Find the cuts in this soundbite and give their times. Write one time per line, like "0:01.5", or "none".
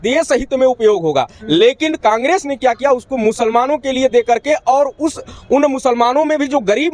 none